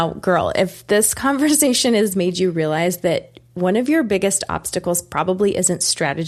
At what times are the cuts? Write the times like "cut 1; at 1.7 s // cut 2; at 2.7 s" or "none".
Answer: none